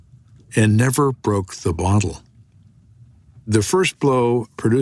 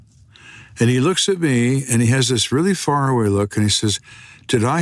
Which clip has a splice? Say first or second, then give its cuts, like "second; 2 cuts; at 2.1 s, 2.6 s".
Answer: first; 1 cut; at 3.4 s